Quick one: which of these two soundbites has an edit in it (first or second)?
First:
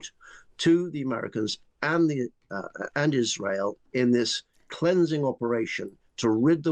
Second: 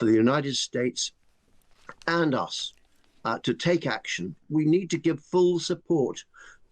second